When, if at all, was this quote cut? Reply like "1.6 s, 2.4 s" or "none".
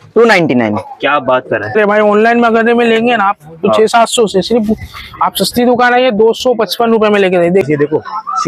1.7 s, 7.6 s